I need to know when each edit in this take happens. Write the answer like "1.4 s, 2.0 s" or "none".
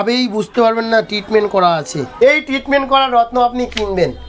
2.0 s